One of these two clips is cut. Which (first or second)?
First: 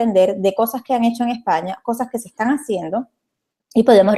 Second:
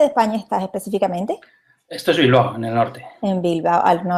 first